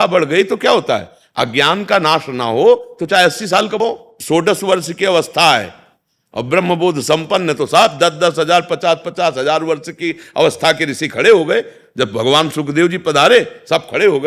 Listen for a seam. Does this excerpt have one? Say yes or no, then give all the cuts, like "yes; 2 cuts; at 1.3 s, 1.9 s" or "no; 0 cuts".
yes; 1 cut; at 4.2 s